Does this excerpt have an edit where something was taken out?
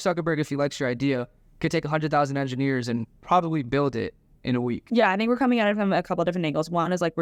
no; 0 cuts

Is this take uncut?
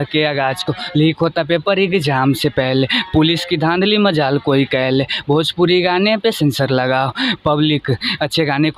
yes; 0 cuts

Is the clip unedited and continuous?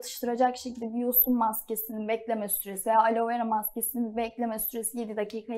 yes; 0 cuts

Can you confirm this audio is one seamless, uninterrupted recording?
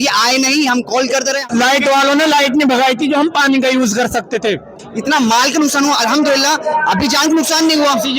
no; 2 cuts; at 1.4 s, 4.8 s

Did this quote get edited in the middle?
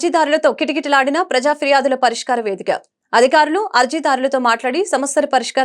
no; 0 cuts

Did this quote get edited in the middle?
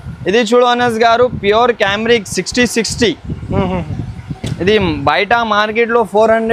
no; 0 cuts

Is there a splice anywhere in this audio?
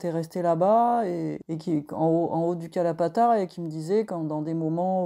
yes; 1 cut; at 1.5 s

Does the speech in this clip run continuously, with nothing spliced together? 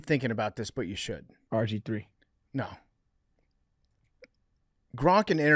no; 1 cut; at 1.3 s

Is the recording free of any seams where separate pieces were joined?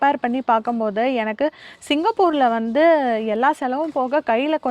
yes; 0 cuts

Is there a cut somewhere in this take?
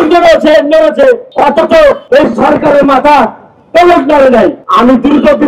yes; 3 cuts; at 1.3 s, 2.0 s, 4.6 s

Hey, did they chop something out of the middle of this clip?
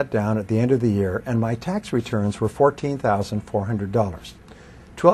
no; 0 cuts

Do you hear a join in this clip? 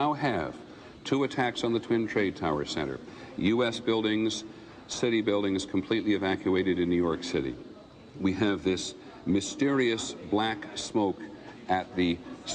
yes; 1 cut; at 9.7 s

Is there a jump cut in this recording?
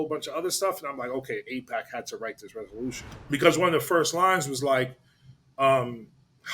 yes; 1 cut; at 3.1 s

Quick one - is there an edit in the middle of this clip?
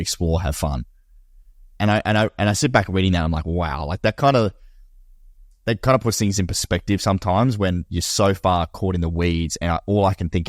no; 0 cuts

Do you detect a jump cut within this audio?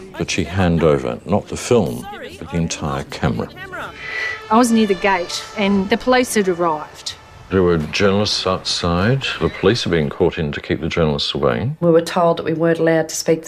no; 0 cuts

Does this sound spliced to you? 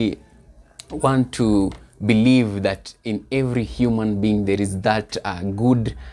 no; 0 cuts

